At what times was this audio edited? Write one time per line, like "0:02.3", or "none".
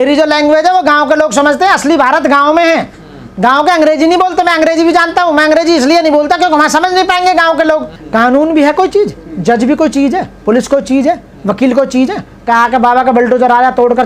0:08.0